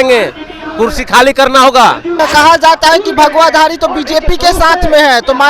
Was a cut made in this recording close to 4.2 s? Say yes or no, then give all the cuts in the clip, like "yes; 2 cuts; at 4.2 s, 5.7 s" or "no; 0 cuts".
no; 1 cut; at 2.1 s